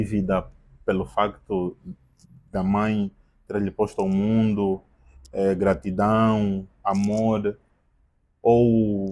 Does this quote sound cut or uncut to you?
uncut